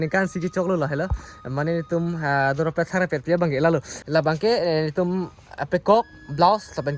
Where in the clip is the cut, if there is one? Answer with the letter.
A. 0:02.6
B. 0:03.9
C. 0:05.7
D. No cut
B